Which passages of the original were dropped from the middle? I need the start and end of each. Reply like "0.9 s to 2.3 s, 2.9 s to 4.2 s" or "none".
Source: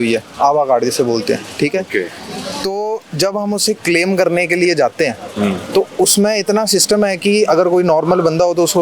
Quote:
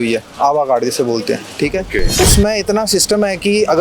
2.1 s to 5.9 s

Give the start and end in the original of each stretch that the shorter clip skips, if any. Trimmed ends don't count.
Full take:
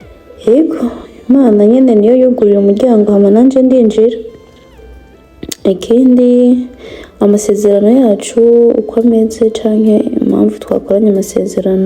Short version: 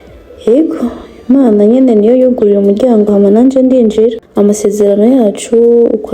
4.2 s to 7.1 s

